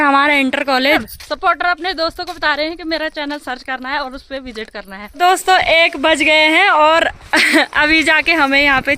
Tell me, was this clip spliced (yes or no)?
yes